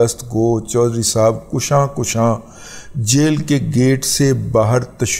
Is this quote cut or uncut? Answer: uncut